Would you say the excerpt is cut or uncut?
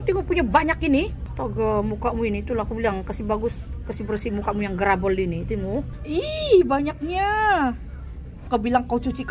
uncut